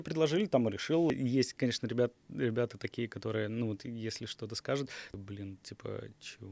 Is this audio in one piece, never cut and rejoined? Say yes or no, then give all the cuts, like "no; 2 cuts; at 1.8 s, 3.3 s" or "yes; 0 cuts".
no; 2 cuts; at 1.1 s, 5.1 s